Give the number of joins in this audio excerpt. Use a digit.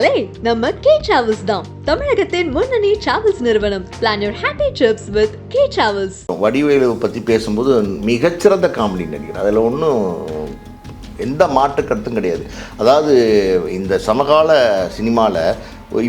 1